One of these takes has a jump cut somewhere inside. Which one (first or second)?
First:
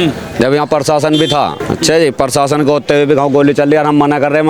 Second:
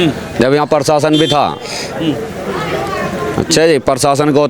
first